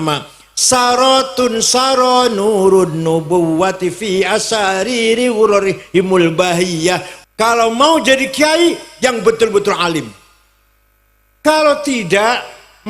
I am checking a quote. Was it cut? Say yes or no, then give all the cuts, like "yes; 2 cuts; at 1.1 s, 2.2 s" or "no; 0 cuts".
yes; 1 cut; at 7.1 s